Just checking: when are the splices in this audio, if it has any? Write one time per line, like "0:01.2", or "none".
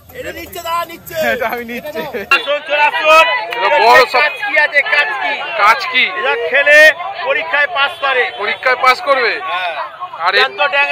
0:02.4